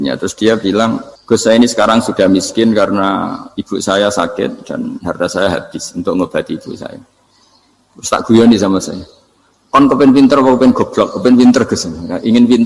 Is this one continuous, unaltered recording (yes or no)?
no